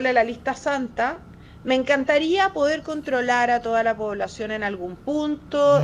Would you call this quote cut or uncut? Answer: uncut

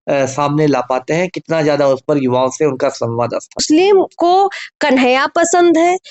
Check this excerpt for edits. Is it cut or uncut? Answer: cut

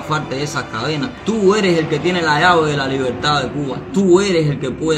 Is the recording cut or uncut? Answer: cut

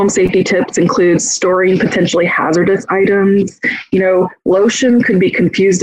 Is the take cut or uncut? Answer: uncut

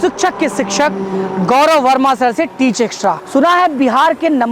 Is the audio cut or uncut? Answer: cut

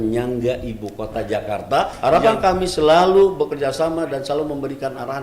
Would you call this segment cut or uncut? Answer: cut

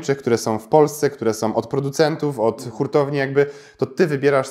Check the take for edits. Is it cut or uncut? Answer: uncut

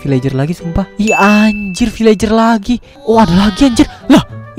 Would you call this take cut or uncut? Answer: cut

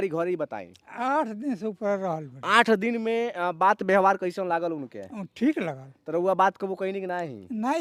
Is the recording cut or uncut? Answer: uncut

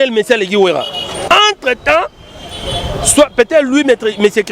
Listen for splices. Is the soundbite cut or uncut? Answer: cut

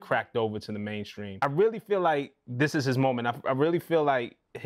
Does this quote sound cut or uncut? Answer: cut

